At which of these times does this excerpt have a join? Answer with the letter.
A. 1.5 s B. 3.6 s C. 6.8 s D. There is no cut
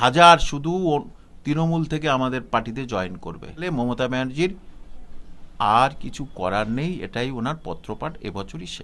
B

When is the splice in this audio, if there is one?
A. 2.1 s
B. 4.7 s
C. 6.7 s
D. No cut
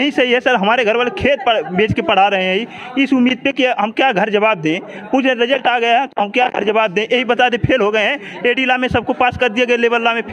D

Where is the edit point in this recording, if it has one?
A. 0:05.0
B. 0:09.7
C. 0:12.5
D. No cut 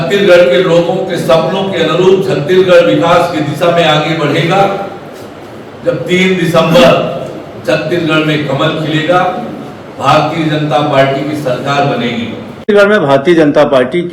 C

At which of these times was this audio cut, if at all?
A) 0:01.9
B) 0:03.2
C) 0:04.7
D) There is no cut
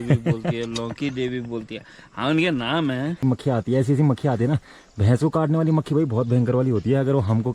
B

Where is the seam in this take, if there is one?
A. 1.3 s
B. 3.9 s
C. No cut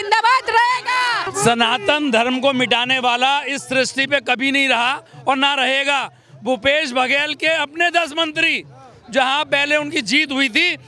A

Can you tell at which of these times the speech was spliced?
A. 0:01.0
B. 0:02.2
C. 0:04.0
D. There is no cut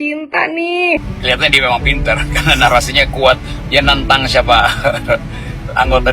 A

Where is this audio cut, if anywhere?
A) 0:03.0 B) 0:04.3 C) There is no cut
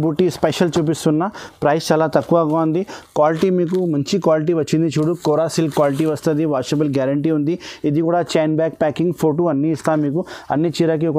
C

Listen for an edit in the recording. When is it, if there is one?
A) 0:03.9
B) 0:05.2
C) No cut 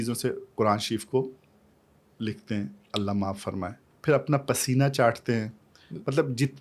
A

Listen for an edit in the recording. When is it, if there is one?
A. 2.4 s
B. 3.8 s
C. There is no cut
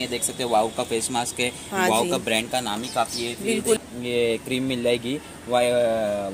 B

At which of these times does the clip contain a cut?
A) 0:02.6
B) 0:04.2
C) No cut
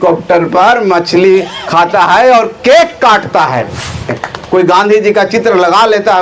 B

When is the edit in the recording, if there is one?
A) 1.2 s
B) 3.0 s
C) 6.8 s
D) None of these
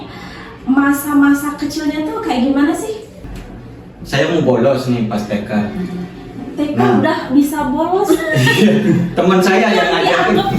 B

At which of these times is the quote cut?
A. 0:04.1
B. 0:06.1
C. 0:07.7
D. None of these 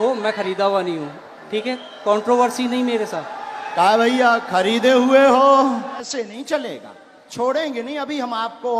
B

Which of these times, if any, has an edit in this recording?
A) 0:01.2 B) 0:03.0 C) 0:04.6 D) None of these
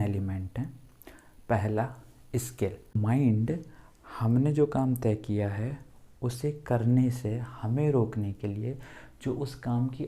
B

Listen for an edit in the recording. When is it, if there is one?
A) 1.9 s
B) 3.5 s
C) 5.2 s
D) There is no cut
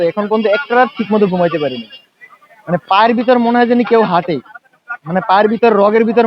D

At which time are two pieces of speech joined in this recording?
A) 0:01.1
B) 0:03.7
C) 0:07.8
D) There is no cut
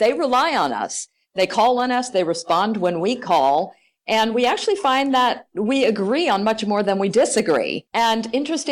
C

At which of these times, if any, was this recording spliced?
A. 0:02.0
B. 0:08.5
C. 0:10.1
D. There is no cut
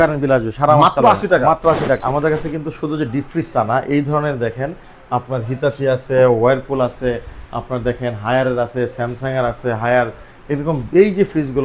A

